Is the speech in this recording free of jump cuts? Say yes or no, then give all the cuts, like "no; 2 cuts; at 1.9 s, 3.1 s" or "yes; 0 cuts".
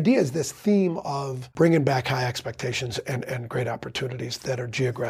no; 1 cut; at 1.4 s